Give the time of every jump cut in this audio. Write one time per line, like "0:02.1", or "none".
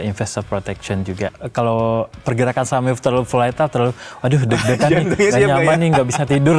0:01.4